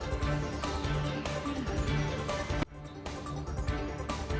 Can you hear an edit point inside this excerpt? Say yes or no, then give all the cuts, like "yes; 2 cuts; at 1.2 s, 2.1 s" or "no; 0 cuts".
no; 0 cuts